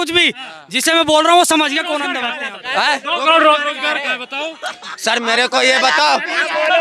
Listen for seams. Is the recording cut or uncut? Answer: cut